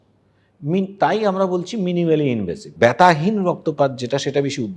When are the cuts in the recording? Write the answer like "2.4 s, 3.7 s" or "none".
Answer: 2.6 s